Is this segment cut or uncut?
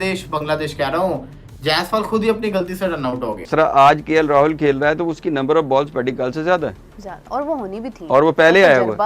cut